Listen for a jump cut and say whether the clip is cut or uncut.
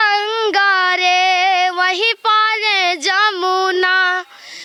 uncut